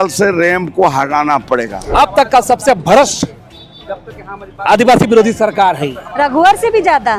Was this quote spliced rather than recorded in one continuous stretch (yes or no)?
yes